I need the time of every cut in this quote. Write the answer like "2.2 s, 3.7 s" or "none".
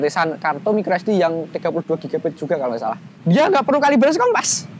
3.1 s

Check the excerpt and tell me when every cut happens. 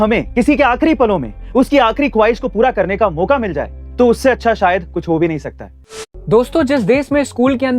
6.0 s

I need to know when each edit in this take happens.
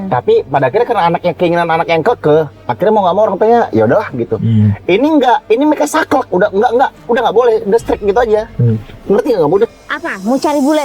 9.7 s

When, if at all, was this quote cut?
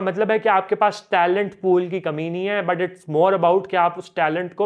none

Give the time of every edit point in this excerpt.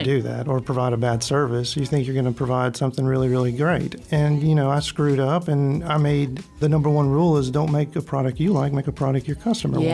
6.6 s

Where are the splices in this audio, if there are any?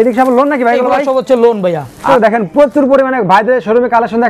2.1 s

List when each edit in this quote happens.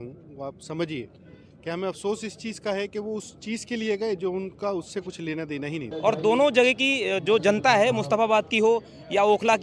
5.9 s

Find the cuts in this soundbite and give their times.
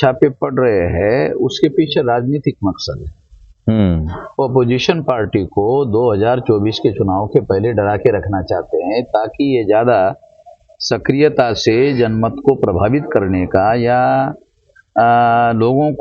none

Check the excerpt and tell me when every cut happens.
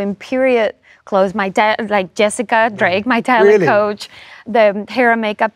none

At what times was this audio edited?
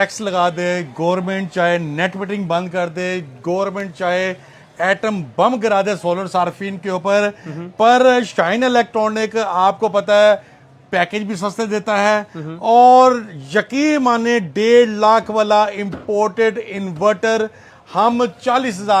none

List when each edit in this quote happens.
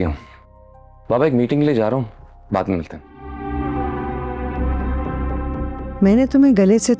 3.3 s

